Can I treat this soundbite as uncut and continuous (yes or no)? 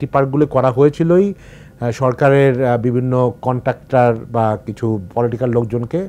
yes